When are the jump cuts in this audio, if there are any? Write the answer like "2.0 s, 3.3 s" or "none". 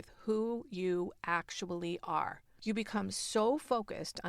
2.5 s